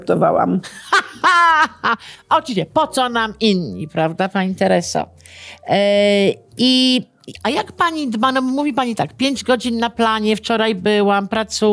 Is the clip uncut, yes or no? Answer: yes